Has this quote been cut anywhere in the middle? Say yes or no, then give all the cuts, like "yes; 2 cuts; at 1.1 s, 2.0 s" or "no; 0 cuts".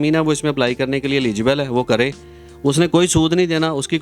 no; 0 cuts